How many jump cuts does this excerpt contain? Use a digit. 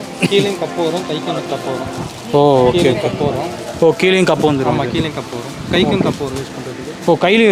0